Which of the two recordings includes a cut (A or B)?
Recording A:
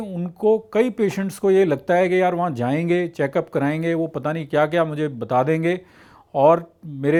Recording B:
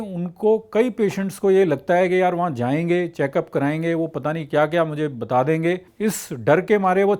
B